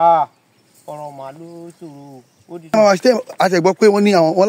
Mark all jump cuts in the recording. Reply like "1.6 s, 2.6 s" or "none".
2.7 s

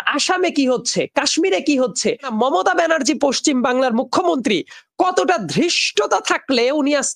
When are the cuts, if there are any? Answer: 2.3 s

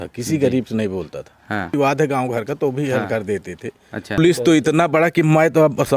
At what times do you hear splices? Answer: 1.7 s, 4.2 s

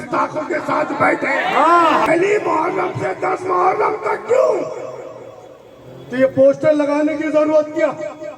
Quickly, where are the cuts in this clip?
2.1 s

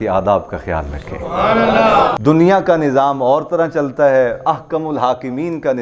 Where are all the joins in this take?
2.2 s

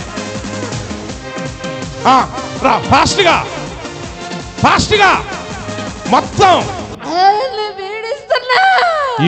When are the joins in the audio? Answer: 7.0 s

